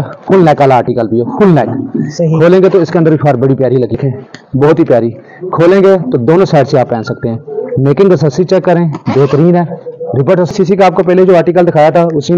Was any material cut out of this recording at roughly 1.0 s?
no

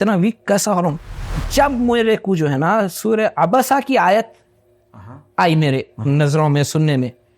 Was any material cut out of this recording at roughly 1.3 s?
yes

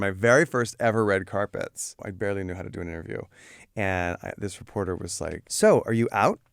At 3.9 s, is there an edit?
no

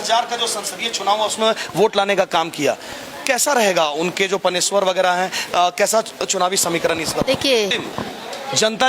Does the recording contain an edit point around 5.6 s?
no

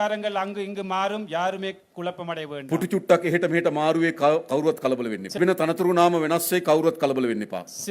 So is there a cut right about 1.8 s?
no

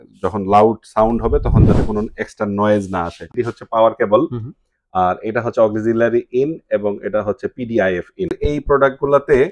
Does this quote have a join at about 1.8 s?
no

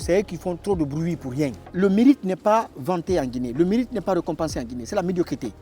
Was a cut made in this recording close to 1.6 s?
yes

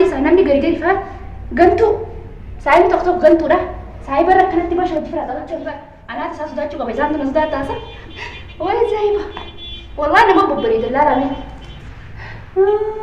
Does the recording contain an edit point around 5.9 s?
yes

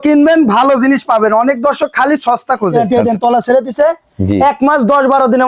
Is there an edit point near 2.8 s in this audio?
yes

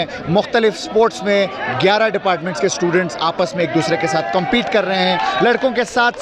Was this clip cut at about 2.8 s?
no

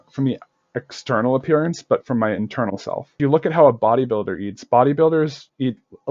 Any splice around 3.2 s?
yes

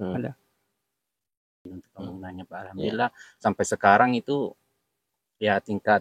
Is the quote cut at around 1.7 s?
yes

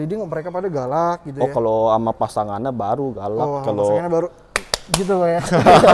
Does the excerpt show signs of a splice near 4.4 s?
no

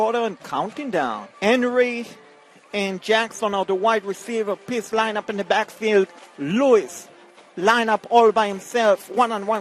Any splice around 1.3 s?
yes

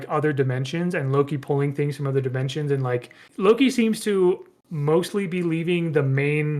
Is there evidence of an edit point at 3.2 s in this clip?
yes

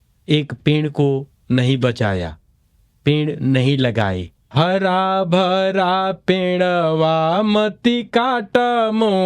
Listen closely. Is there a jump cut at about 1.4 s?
no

